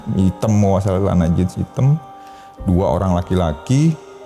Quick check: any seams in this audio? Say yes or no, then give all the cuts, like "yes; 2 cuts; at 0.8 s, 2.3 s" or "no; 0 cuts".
no; 0 cuts